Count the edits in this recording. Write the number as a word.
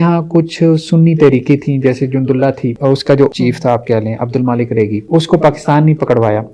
two